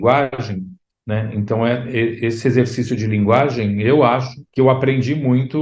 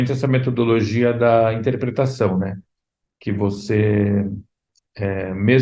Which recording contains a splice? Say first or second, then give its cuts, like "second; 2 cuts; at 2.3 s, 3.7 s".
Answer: first; 1 cut; at 4.4 s